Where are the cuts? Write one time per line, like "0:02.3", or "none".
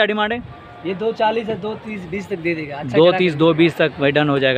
none

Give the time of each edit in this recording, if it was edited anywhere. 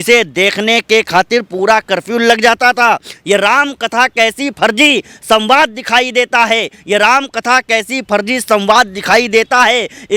none

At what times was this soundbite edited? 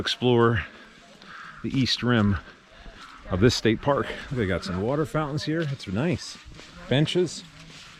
none

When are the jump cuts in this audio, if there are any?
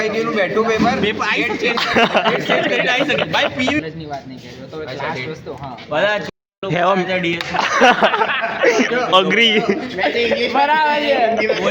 0:03.8

